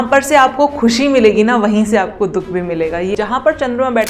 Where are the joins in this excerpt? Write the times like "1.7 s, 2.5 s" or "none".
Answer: 3.1 s